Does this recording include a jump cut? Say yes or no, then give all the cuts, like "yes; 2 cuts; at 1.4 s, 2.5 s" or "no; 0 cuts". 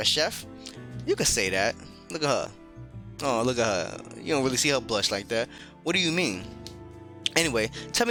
no; 0 cuts